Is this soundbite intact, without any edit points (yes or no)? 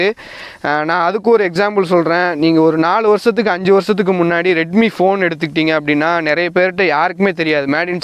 yes